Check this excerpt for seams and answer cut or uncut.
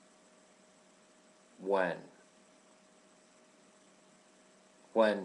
cut